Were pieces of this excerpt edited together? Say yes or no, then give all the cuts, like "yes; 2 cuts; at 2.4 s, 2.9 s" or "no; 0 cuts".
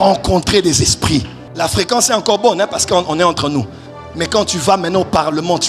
yes; 1 cut; at 1.4 s